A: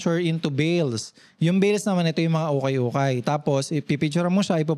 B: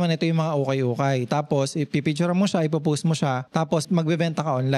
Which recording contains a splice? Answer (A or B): B